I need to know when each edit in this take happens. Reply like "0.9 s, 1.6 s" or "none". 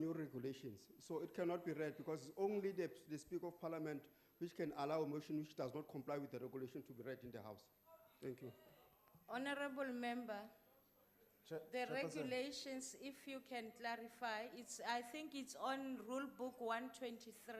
8.3 s